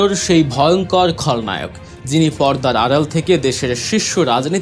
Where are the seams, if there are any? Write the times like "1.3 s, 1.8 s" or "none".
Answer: none